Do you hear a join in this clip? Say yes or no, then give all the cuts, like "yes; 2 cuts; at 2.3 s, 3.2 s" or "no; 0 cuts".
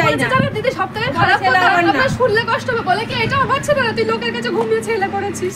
no; 0 cuts